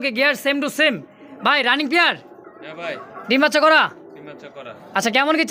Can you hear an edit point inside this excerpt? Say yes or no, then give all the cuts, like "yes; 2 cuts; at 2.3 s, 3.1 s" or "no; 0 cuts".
no; 0 cuts